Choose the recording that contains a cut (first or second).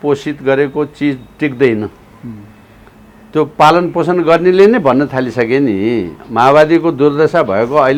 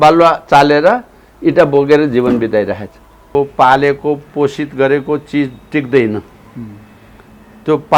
second